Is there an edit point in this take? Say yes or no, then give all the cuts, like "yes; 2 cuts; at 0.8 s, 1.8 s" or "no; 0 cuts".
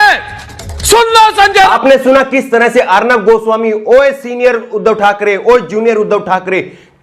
no; 0 cuts